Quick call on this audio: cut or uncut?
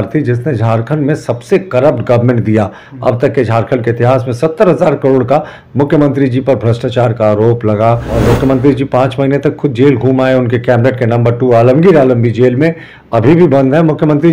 cut